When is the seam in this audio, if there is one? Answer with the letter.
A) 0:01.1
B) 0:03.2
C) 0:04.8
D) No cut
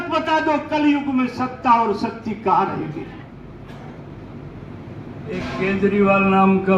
B